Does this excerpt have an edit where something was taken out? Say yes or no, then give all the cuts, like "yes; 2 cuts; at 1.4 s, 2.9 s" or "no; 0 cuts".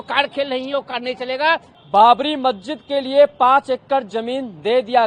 yes; 1 cut; at 1.7 s